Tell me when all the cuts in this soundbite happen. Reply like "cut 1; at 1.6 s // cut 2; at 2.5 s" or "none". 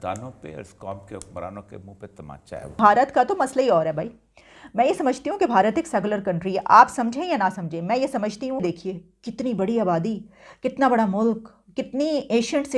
cut 1; at 2.8 s // cut 2; at 8.6 s